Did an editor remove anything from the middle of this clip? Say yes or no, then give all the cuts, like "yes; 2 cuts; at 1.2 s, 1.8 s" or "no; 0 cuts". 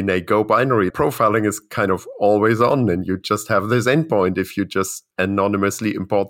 yes; 2 cuts; at 0.9 s, 5.0 s